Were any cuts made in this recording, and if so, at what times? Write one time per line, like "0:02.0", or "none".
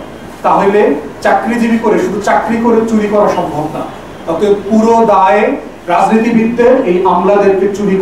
none